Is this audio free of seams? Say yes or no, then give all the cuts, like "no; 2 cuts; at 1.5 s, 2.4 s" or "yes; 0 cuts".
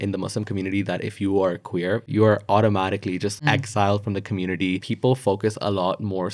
no; 3 cuts; at 2.1 s, 3.4 s, 4.8 s